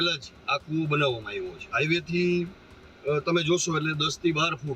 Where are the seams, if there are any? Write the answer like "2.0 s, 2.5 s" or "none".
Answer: 1.6 s